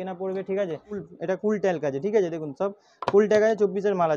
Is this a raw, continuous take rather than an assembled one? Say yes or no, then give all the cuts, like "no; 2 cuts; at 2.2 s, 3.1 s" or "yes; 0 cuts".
no; 1 cut; at 1.0 s